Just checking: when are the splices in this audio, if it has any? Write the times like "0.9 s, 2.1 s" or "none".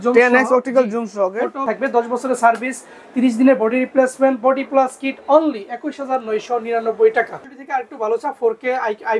1.6 s, 7.3 s